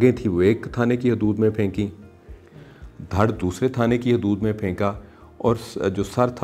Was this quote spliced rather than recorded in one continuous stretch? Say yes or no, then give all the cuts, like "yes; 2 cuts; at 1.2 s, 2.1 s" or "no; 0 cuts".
no; 0 cuts